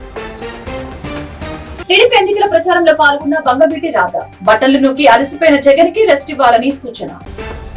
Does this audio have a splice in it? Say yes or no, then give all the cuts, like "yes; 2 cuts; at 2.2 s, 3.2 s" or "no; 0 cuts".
no; 0 cuts